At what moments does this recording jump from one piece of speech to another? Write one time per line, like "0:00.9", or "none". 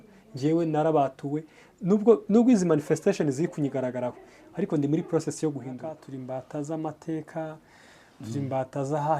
0:06.1